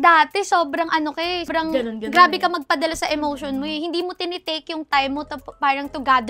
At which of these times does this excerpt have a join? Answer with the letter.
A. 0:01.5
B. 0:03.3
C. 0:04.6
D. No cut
A